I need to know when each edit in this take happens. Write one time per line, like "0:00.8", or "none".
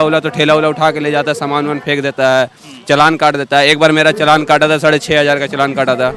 none